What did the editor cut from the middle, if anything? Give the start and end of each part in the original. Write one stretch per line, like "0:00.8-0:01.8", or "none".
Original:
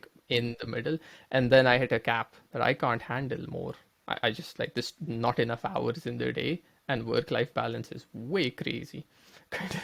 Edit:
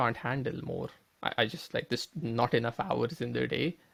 none